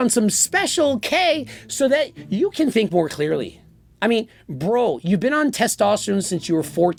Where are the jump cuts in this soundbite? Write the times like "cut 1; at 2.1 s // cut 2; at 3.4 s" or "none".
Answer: none